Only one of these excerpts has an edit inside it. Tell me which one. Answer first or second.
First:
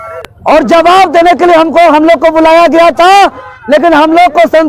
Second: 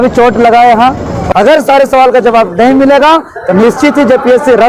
second